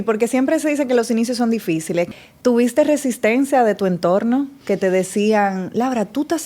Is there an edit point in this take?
yes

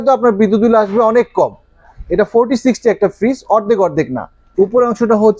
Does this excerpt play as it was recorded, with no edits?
no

